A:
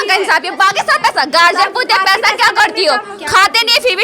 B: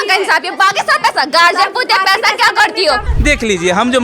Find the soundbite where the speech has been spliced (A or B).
B